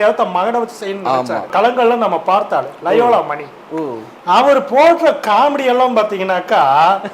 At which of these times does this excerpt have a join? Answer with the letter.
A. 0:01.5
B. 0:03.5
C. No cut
A